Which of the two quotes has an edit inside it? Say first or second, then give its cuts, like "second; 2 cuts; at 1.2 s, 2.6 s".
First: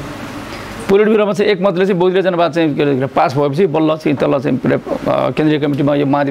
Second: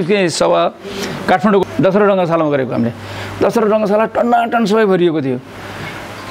second; 1 cut; at 1.6 s